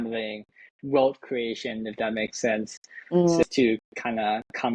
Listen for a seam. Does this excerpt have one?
yes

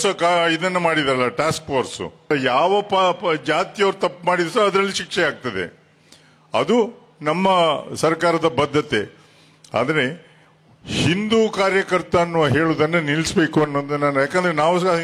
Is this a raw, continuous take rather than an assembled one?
no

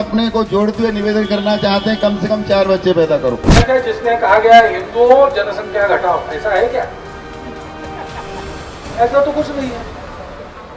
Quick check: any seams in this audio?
yes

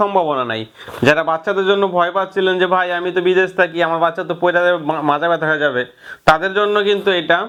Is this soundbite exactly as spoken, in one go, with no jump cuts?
yes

